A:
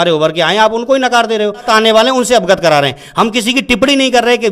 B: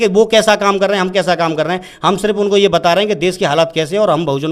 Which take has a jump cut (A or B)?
A